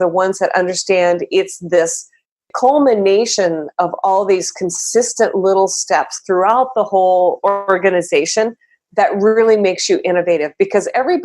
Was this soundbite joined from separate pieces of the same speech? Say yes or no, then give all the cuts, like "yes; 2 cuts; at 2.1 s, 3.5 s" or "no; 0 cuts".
yes; 1 cut; at 2.5 s